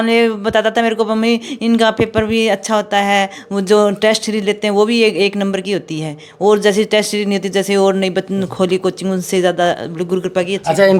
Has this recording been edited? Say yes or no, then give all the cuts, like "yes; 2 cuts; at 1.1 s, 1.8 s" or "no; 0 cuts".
no; 0 cuts